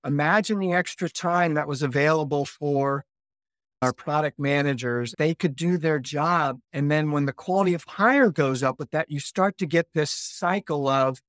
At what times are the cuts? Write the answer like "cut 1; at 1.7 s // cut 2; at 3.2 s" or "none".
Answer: cut 1; at 3.8 s // cut 2; at 5.1 s // cut 3; at 6.6 s

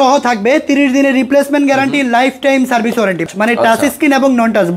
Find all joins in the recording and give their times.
cut 1; at 3.3 s

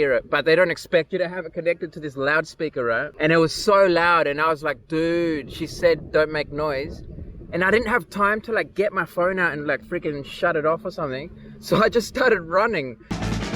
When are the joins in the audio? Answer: cut 1; at 3.1 s

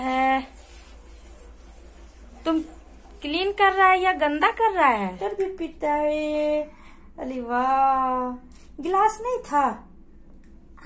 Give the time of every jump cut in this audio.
cut 1; at 5.2 s

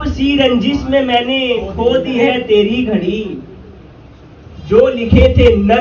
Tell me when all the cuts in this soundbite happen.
none

